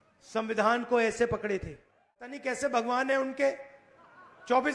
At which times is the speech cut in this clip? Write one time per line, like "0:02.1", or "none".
0:02.4